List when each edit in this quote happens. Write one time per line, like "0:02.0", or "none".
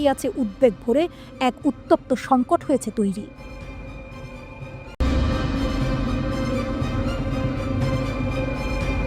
0:05.0